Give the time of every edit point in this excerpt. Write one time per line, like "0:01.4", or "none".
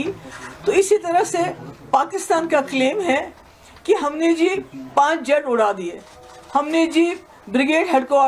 none